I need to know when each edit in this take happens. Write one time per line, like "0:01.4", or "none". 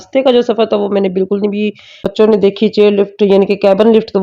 0:02.0